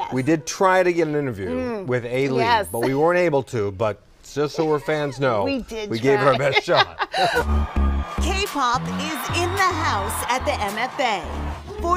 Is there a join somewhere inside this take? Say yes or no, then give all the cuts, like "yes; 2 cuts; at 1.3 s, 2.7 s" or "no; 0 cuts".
no; 0 cuts